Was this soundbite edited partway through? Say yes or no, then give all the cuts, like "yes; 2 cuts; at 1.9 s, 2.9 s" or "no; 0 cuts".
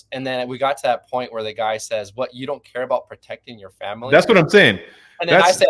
no; 0 cuts